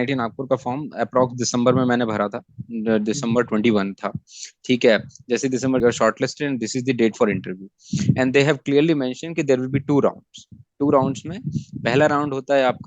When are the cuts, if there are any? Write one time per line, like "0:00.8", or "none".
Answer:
0:05.8